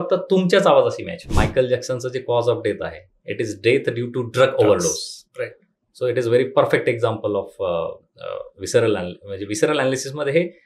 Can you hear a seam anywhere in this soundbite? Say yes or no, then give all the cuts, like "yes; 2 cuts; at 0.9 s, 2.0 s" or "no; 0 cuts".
yes; 1 cut; at 1.3 s